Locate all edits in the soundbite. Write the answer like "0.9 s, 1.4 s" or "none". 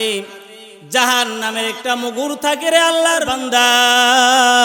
3.3 s